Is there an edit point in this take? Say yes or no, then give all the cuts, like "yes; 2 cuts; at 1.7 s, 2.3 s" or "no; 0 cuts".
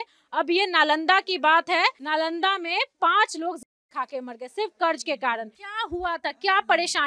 yes; 2 cuts; at 2.0 s, 5.6 s